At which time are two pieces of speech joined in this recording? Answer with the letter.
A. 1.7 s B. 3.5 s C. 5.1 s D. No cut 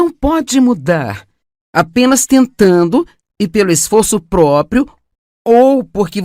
D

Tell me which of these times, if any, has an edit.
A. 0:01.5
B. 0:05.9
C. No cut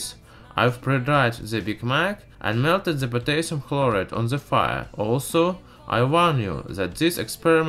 A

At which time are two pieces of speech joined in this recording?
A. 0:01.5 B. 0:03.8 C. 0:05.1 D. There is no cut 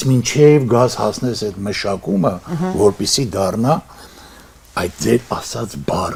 D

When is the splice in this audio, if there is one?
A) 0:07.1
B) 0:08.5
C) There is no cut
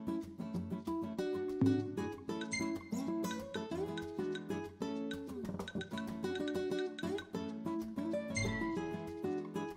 C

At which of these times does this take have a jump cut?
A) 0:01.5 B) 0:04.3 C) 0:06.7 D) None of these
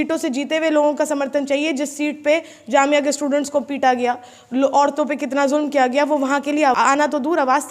C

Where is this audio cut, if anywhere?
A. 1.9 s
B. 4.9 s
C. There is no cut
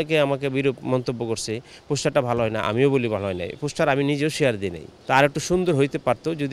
B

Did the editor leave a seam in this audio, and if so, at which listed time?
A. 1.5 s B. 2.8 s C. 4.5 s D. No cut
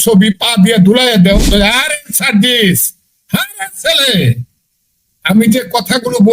A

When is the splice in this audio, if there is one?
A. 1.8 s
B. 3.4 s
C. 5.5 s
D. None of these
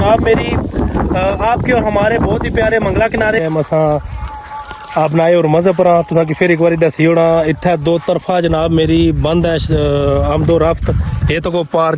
B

